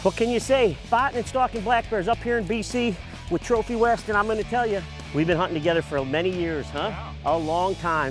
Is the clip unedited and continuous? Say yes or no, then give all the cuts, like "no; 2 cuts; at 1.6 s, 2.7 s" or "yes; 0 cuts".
no; 2 cuts; at 0.8 s, 5.0 s